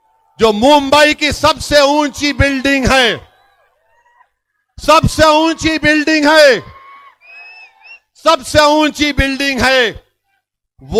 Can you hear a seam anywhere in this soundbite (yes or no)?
no